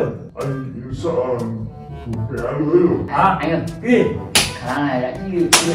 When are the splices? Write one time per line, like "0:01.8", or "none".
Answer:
0:03.1